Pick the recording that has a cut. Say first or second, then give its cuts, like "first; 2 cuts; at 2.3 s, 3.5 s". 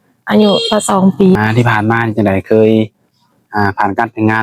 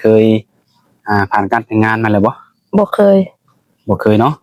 first; 1 cut; at 1.4 s